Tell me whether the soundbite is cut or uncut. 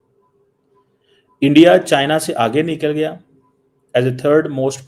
uncut